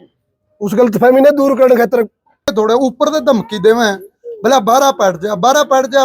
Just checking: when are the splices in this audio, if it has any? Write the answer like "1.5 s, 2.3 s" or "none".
2.5 s